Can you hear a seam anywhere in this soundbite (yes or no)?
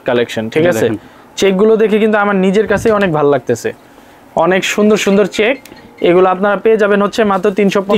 no